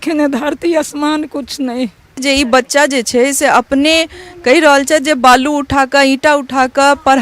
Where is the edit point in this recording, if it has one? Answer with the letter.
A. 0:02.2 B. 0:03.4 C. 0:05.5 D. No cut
A